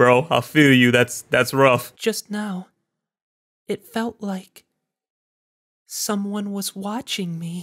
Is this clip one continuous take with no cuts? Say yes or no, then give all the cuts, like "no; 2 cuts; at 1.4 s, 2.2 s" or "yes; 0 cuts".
no; 1 cut; at 1.9 s